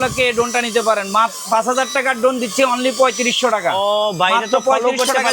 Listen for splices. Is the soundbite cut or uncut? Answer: uncut